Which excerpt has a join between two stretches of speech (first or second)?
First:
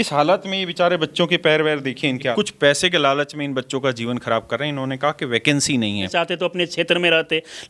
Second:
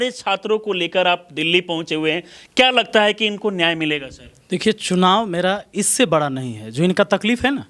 first